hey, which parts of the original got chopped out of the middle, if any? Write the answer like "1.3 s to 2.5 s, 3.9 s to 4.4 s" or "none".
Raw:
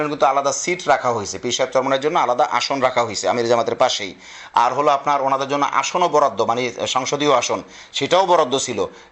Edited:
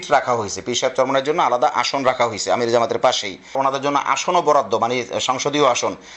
4.3 s to 5.2 s